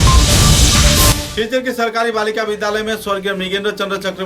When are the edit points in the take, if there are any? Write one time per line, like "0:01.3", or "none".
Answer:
0:01.1